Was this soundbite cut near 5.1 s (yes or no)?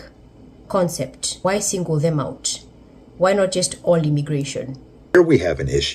yes